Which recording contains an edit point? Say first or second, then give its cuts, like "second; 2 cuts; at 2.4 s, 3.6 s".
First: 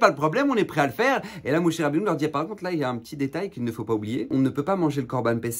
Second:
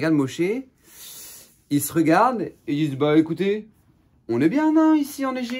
first; 1 cut; at 4.3 s